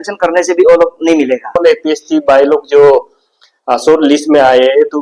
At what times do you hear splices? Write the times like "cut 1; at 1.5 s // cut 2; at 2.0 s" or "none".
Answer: cut 1; at 1.6 s